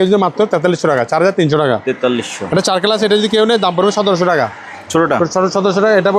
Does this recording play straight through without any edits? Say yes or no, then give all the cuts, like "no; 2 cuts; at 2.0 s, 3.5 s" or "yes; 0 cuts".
yes; 0 cuts